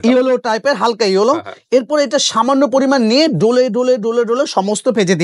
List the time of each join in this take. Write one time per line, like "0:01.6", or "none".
none